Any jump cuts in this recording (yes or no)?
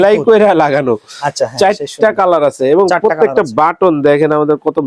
no